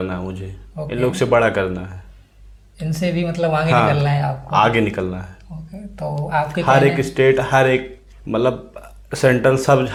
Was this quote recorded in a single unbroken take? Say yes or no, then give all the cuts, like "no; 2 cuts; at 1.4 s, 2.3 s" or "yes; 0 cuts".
yes; 0 cuts